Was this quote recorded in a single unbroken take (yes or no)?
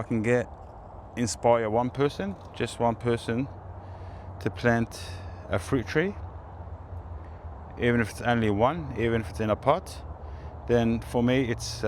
yes